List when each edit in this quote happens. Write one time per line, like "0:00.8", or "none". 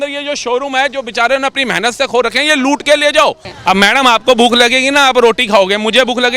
0:03.5